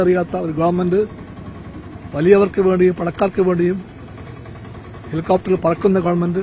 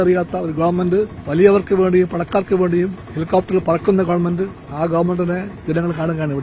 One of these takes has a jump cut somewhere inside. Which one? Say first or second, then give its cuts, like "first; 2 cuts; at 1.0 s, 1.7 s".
second; 4 cuts; at 1.2 s, 3.1 s, 4.6 s, 5.5 s